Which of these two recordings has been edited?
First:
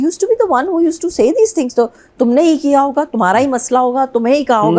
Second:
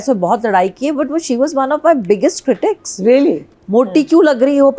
second; 1 cut; at 3.5 s

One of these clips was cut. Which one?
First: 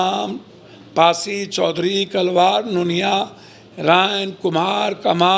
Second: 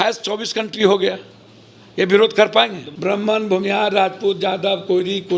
second; 1 cut; at 2.8 s

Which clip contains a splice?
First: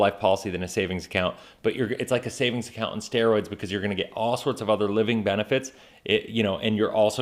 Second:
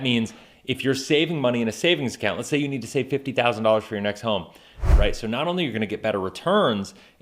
second; 1 cut; at 4.8 s

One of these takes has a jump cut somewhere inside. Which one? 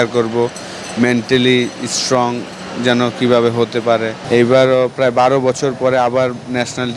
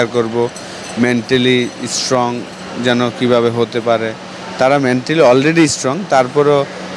first; 1 cut; at 4.2 s

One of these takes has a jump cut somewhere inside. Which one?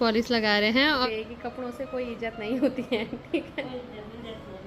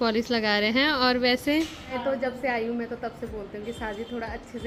first; 1 cut; at 1.0 s

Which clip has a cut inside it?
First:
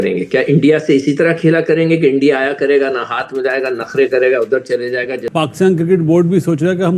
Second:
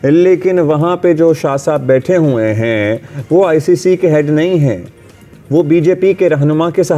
first; 1 cut; at 5.2 s

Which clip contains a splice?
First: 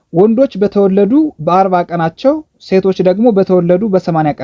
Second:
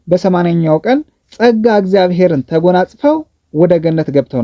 second; 1 cut; at 1.2 s

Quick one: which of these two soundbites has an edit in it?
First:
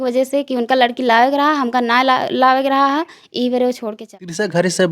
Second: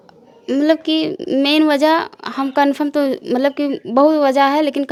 first; 1 cut; at 3.9 s

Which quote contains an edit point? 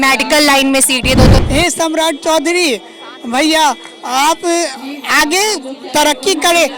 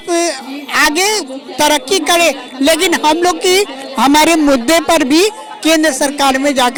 first; 1 cut; at 1.4 s

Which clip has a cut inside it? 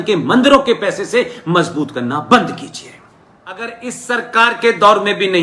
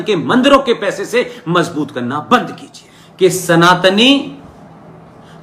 first; 1 cut; at 3.1 s

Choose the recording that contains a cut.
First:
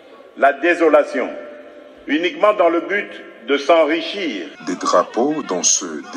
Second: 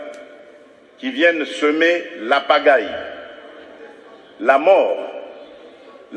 first; 1 cut; at 4.5 s

